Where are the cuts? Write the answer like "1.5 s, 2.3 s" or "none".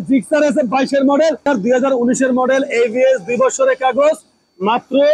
1.5 s